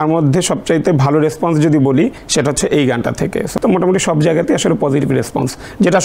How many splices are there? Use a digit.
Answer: 2